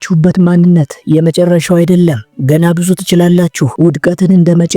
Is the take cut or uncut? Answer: cut